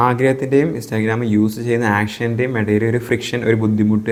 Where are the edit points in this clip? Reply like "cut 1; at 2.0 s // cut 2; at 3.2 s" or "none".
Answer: none